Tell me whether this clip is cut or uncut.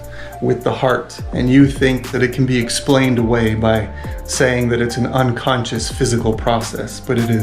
cut